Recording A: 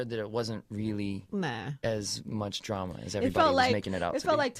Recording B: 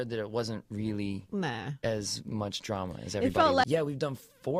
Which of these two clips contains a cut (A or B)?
A